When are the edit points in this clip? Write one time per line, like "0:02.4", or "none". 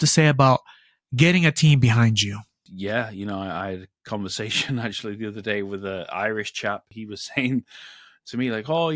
0:02.6
0:07.0